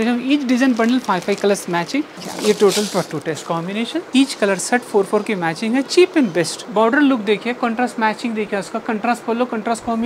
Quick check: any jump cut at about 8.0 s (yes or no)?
no